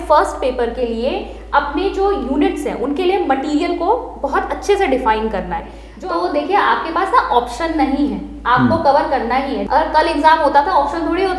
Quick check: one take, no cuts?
no; 2 cuts; at 5.8 s, 9.6 s

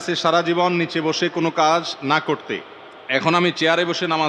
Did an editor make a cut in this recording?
no; 0 cuts

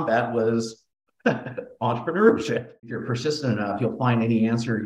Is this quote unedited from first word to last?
no; 1 cut; at 2.9 s

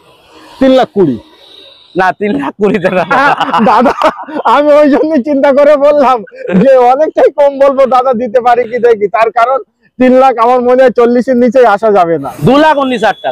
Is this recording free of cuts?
no; 1 cut; at 12.3 s

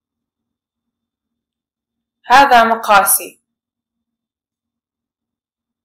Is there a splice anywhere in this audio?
no; 0 cuts

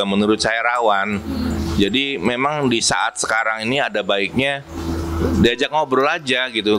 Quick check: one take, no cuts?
yes; 0 cuts

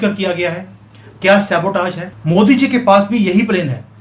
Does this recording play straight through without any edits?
no; 1 cut; at 2.1 s

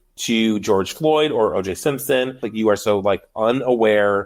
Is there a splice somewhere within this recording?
yes; 1 cut; at 2.4 s

